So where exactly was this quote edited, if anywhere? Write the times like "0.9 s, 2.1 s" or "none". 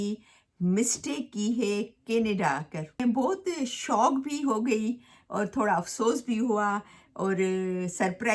3.0 s